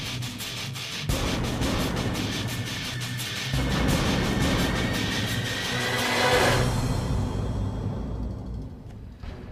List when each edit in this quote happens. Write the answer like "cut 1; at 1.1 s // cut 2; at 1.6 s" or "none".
none